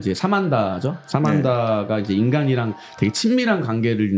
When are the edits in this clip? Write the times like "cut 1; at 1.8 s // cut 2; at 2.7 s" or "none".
none